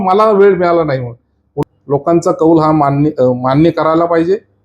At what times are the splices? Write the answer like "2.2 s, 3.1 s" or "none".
1.5 s

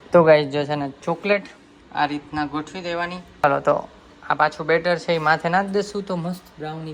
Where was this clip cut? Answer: none

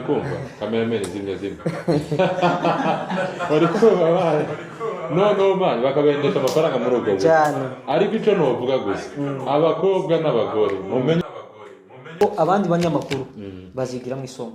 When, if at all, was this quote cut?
12.2 s

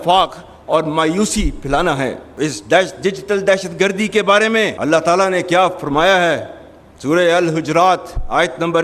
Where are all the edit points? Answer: 2.2 s, 4.7 s

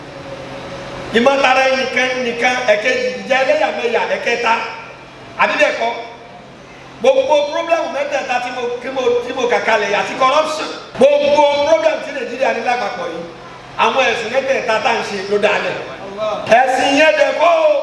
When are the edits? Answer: 10.8 s, 16.4 s

